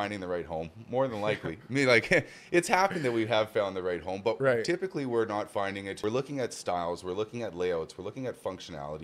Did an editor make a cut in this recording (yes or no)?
yes